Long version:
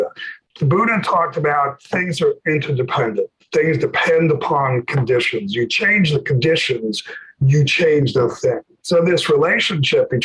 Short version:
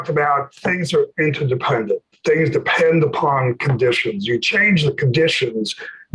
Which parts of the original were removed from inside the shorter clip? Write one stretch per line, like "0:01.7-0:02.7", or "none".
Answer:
none